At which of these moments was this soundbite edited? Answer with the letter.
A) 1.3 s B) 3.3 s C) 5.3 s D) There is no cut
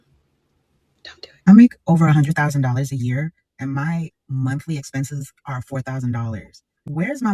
A